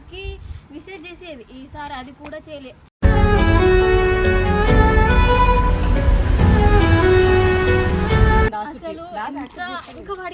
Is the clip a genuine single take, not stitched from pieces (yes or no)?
no